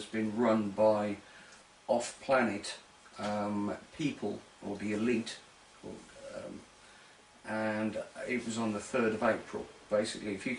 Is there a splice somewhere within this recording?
yes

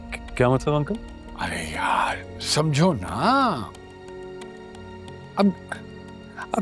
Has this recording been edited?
yes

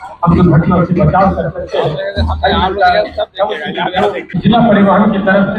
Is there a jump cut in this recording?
yes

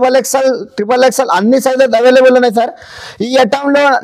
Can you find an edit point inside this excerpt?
no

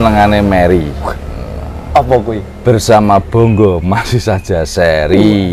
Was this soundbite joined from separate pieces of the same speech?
no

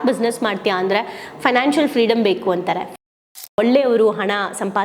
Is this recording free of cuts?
no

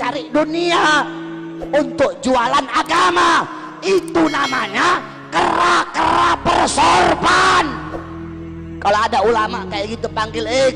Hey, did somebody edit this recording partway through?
no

